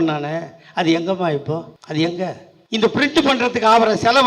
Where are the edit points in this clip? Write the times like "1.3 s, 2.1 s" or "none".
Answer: 1.8 s, 2.5 s